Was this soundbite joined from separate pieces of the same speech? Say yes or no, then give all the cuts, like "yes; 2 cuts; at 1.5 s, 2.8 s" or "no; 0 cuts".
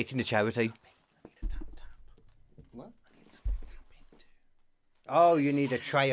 no; 0 cuts